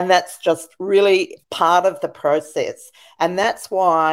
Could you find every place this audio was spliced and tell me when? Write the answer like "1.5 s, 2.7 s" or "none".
none

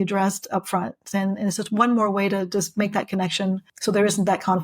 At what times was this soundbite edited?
3.7 s

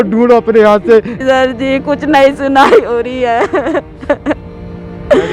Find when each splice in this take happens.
1.1 s

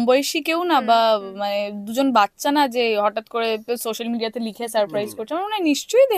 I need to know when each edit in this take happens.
none

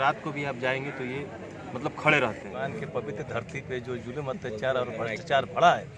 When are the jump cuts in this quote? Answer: 2.6 s

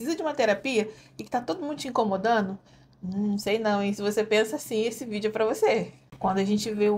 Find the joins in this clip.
6.0 s

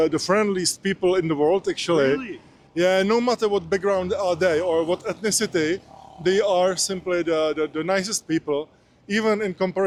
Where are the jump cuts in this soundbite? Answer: none

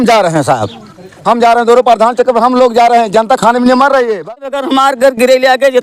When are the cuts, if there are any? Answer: 4.6 s

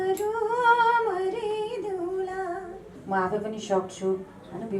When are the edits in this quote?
2.9 s

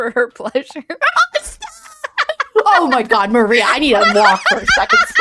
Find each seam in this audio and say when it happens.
0.9 s

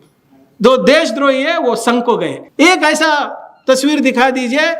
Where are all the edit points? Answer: 2.4 s

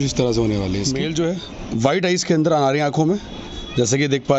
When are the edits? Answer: 0.9 s

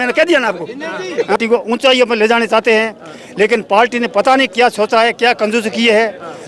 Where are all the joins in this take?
1.4 s

